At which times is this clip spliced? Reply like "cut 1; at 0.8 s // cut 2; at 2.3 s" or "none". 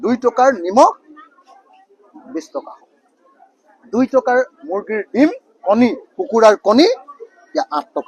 none